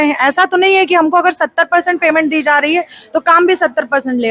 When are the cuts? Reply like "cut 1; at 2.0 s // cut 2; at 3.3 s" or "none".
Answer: none